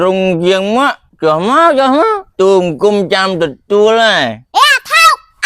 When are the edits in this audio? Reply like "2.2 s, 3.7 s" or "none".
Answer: 1.0 s, 2.2 s, 4.4 s